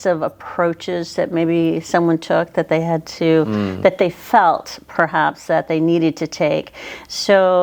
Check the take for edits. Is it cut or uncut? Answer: uncut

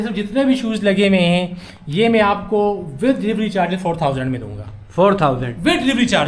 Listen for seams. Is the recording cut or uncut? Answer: uncut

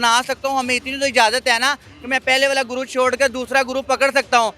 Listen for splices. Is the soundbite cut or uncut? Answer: uncut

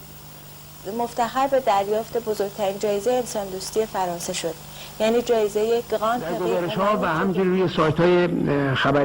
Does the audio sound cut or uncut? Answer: cut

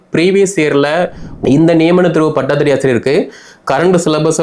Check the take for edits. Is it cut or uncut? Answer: cut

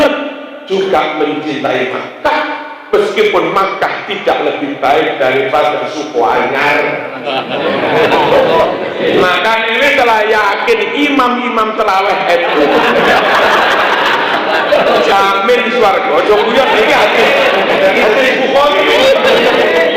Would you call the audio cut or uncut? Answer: cut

